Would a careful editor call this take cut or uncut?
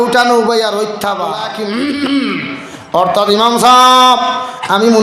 cut